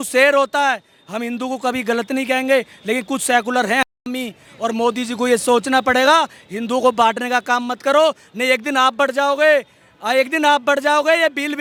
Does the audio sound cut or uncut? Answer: uncut